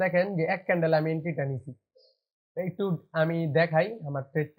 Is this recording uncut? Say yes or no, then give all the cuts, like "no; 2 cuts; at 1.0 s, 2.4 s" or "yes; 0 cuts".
yes; 0 cuts